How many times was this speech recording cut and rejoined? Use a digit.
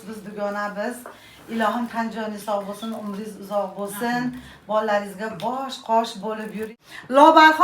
1